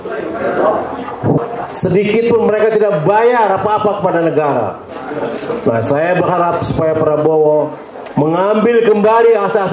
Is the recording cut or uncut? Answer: cut